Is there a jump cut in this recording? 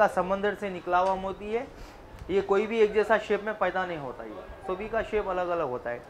no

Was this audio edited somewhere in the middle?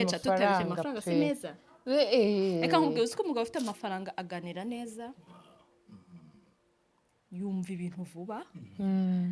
no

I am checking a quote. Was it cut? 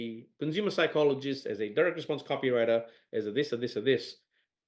no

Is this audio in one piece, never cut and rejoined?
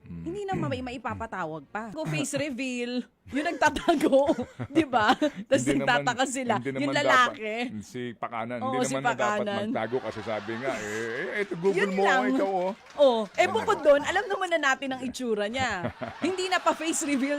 no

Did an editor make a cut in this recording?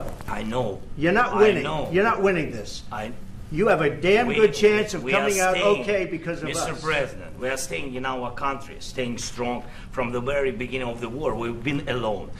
no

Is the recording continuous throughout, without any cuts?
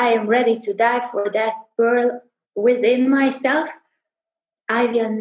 yes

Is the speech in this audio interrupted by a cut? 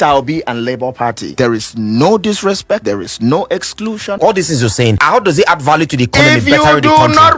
yes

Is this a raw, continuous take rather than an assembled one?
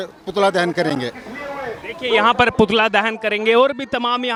yes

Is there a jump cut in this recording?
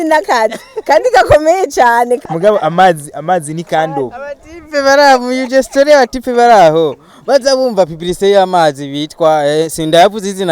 yes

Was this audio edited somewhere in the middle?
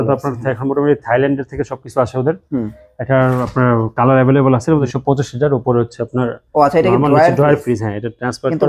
yes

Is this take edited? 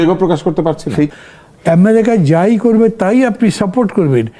yes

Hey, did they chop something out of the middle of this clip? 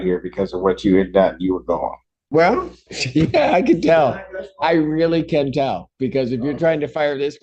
yes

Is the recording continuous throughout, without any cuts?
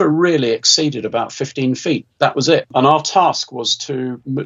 no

